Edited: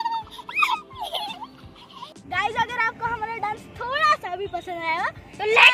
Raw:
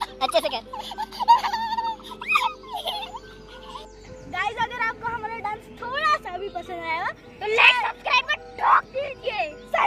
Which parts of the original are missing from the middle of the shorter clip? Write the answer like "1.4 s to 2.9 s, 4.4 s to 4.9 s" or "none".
3.8 s to 4.1 s